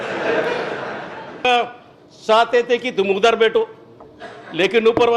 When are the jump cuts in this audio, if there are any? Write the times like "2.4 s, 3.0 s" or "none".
1.4 s